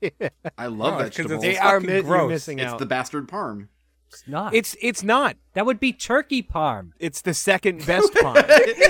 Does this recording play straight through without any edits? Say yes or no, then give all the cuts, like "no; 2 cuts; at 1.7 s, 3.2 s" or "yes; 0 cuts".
yes; 0 cuts